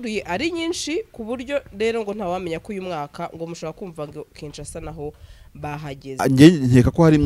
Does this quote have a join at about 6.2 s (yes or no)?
yes